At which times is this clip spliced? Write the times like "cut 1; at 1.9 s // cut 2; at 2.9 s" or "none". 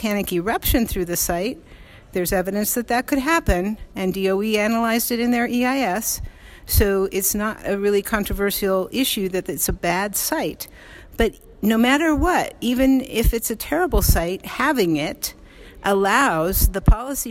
none